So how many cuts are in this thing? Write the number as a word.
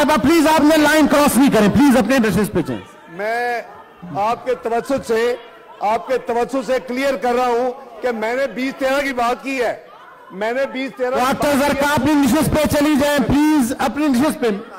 zero